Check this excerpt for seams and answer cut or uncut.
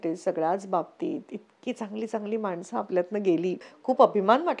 cut